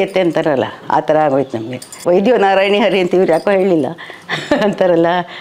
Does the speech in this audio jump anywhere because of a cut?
yes; 1 cut; at 2.0 s

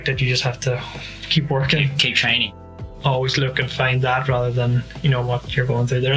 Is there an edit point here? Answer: yes; 1 cut; at 2.6 s

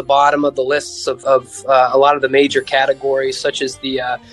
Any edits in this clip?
yes; 1 cut; at 1.2 s

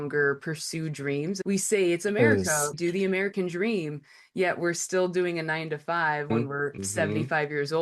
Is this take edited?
yes; 3 cuts; at 1.4 s, 2.8 s, 6.3 s

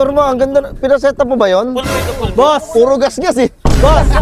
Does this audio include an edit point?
no; 0 cuts

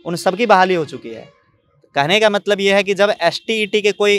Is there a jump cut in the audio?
no; 0 cuts

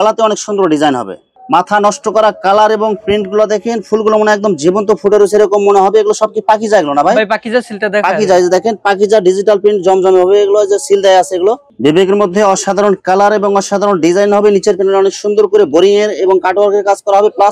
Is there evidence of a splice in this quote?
yes; 2 cuts; at 1.3 s, 11.7 s

